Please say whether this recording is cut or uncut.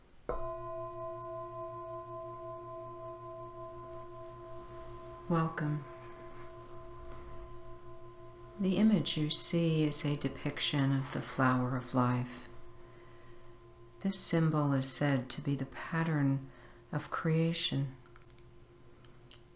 cut